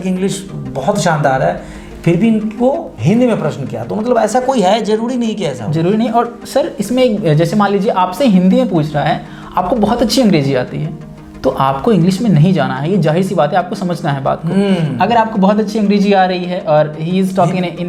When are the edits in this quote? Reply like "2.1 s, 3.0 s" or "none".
none